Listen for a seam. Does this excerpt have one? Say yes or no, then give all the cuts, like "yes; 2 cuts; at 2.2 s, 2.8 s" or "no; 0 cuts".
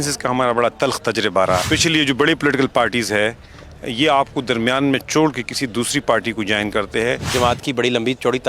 yes; 2 cuts; at 1.6 s, 7.3 s